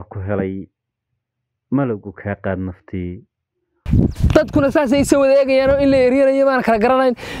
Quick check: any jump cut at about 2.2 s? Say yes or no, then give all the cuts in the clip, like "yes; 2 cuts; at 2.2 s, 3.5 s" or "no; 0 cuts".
no; 1 cut; at 3.8 s